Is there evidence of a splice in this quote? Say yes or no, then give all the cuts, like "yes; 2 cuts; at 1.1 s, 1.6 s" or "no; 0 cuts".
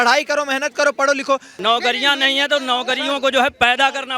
yes; 1 cut; at 1.5 s